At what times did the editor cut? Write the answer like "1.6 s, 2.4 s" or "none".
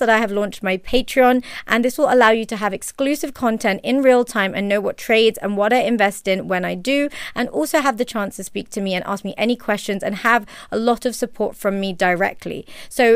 none